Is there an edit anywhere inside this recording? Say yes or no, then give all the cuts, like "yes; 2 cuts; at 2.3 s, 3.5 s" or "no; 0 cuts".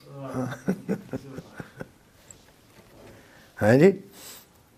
no; 0 cuts